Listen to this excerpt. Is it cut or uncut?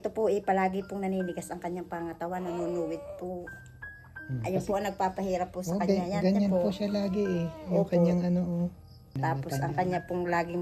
cut